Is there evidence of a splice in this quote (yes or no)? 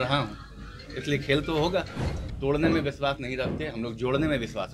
yes